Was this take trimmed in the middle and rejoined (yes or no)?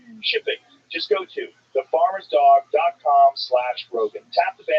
yes